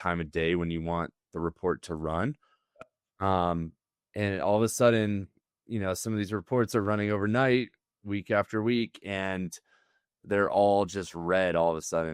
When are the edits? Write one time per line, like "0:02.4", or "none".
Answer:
none